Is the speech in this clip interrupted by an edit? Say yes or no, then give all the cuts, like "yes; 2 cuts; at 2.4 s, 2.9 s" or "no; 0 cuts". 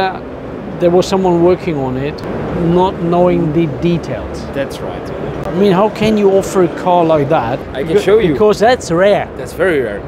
yes; 2 cuts; at 5.5 s, 7.7 s